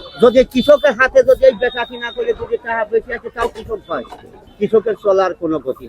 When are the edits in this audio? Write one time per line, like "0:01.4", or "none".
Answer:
0:04.3